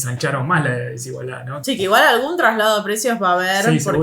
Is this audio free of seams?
no; 1 cut; at 1.5 s

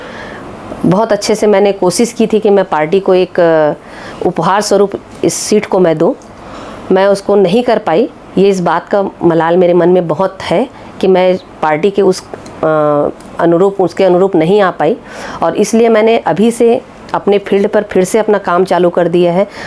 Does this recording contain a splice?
no; 0 cuts

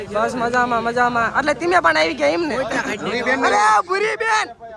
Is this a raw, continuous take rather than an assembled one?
yes; 0 cuts

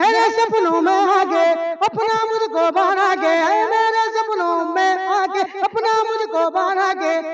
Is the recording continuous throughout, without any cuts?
yes; 0 cuts

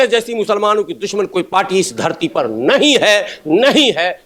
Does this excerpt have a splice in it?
no; 0 cuts

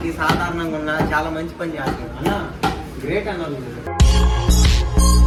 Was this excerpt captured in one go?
yes; 0 cuts

